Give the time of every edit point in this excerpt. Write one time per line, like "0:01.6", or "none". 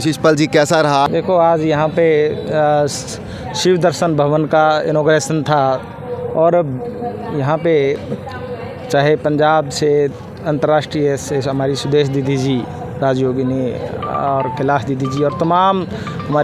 0:01.1